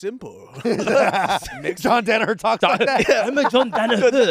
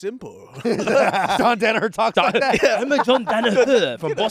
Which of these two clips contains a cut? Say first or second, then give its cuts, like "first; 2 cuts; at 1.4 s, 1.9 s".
second; 1 cut; at 1.4 s